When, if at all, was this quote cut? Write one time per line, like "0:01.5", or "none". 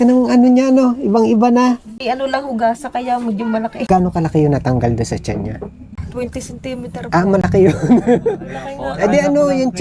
0:01.9
0:03.9
0:05.9